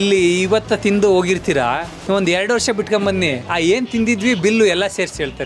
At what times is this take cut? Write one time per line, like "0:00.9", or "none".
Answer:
0:03.4